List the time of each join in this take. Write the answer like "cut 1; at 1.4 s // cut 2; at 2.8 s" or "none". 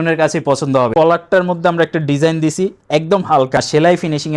cut 1; at 0.9 s // cut 2; at 3.6 s